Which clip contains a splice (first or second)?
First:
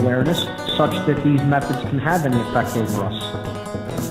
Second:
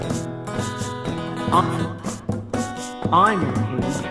second